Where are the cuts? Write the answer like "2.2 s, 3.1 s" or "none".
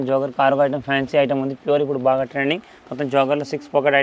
none